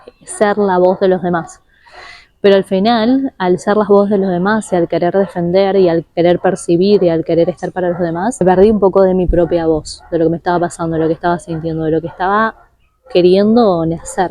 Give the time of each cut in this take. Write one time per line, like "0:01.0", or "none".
0:08.4